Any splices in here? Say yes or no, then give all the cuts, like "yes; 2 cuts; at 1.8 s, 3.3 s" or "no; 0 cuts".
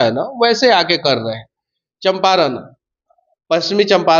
no; 0 cuts